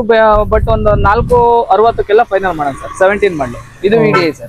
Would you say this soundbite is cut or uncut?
uncut